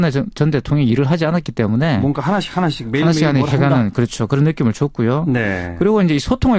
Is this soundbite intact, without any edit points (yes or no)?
yes